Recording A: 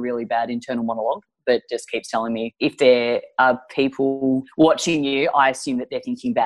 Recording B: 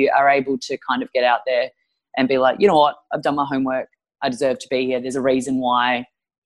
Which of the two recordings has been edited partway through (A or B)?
A